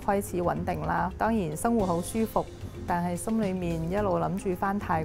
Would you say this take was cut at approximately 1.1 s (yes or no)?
yes